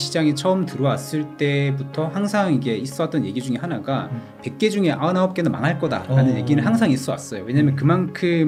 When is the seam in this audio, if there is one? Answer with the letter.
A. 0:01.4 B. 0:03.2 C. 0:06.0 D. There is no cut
D